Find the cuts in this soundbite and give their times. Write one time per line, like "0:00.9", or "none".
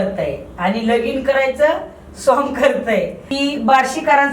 0:03.2